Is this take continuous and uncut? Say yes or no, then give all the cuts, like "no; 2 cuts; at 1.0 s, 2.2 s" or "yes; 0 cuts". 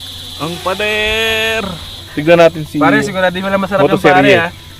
no; 1 cut; at 2.1 s